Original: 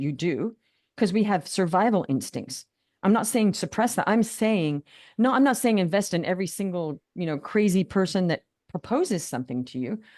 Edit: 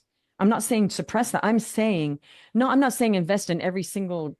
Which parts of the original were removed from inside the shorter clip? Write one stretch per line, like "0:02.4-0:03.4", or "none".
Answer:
none